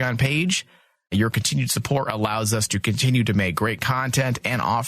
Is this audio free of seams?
no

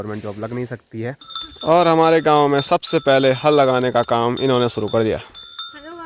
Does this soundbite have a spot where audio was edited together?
yes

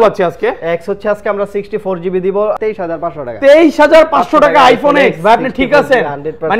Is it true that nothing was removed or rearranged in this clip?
no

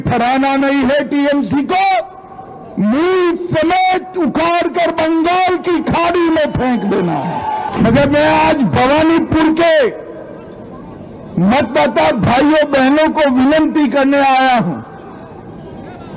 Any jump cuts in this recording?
yes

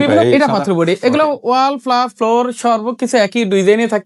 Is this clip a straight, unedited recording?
yes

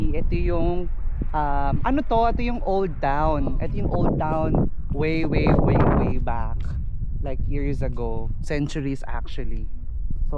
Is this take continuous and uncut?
yes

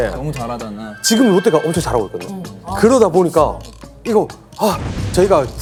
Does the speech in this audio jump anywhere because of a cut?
no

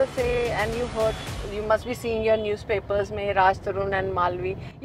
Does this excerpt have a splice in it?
no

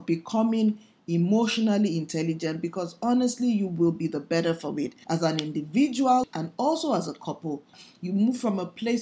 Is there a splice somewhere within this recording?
yes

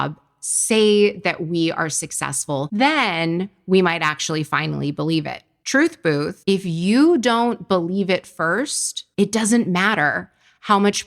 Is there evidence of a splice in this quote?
yes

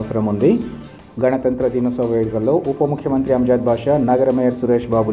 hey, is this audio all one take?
yes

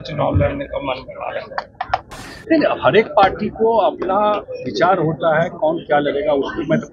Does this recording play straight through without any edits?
yes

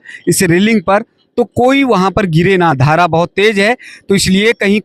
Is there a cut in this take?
no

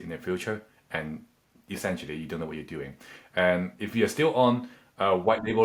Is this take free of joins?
yes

